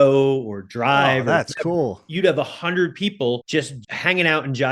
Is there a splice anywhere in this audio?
yes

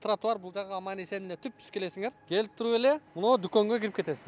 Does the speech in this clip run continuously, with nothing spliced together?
no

